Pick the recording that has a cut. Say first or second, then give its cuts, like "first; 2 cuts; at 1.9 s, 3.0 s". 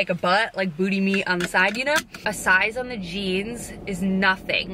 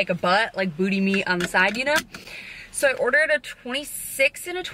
first; 1 cut; at 2.1 s